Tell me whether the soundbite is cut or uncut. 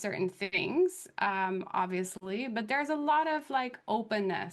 cut